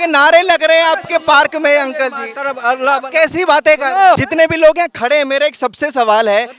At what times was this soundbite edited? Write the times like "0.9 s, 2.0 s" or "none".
4.2 s